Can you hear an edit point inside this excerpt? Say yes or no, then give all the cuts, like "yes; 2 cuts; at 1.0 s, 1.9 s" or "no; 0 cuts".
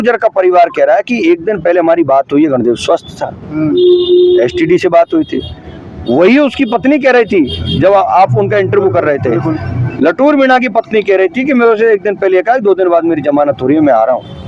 no; 0 cuts